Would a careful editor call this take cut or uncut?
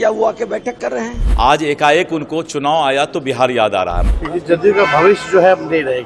cut